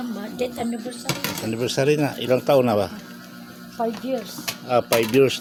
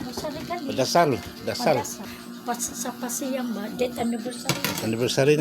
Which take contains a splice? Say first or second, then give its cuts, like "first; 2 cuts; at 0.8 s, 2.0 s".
second; 1 cut; at 2.1 s